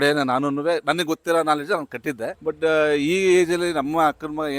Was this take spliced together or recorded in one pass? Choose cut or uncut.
cut